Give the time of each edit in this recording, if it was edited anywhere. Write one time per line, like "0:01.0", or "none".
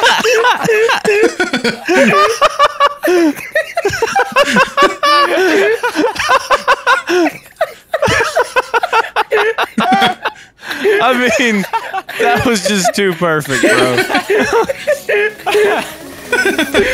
none